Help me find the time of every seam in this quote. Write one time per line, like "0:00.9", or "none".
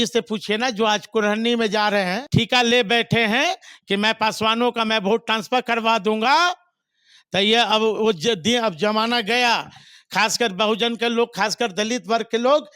0:02.2